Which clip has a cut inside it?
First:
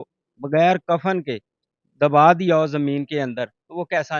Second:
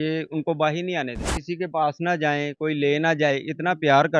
second; 1 cut; at 1.2 s

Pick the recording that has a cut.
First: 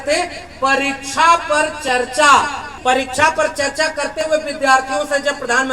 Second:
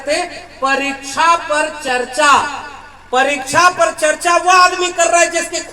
first; 1 cut; at 2.7 s

